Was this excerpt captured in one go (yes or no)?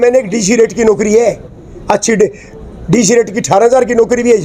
yes